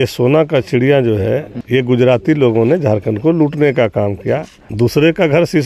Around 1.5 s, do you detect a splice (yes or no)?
yes